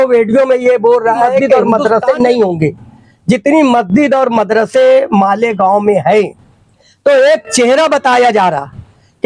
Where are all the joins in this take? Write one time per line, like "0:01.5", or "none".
0:01.5